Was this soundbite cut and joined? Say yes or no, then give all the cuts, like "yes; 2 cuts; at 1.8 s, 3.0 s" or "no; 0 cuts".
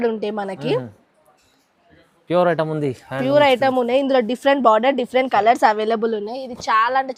no; 0 cuts